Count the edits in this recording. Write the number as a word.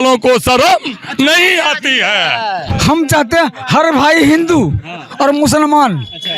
one